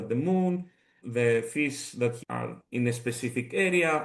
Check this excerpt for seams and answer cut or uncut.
cut